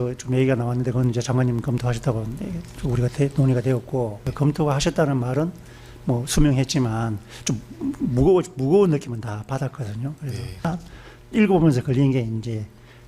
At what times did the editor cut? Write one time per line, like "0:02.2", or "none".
0:04.3
0:10.7